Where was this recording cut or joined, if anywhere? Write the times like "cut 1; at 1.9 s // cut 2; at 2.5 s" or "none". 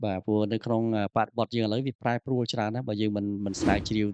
none